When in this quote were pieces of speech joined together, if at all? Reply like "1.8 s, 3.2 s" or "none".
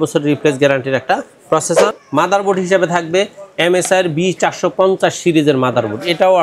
2.0 s